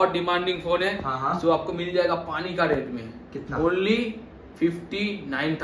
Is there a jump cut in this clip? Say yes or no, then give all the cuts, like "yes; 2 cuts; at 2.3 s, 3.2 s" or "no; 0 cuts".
no; 0 cuts